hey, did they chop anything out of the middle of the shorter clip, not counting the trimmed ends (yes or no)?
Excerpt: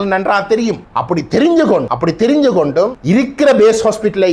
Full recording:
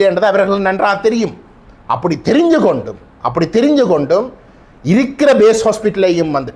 yes